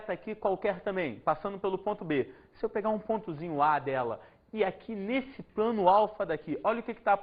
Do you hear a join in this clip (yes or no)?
yes